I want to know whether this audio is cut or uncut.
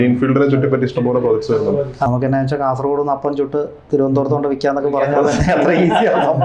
cut